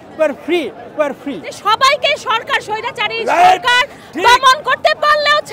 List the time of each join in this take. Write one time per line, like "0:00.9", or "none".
0:01.5